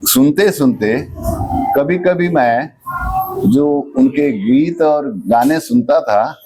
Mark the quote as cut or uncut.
uncut